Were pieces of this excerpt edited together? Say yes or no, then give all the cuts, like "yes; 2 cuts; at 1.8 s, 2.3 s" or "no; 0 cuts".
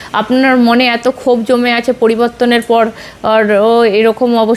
no; 0 cuts